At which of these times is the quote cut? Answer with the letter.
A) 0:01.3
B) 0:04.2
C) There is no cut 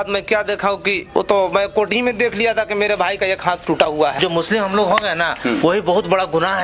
B